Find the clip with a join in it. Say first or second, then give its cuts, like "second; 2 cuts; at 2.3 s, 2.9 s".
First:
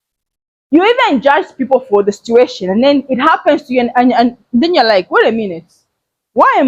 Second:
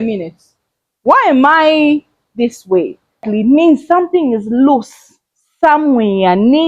second; 1 cut; at 3.2 s